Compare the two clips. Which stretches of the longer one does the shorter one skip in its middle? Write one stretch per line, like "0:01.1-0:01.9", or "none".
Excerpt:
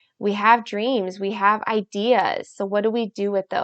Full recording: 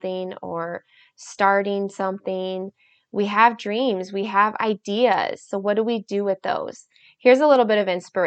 none